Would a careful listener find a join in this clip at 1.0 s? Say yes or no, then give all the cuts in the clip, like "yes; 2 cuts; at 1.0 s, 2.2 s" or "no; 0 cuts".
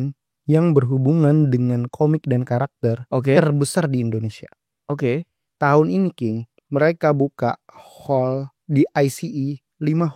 no; 0 cuts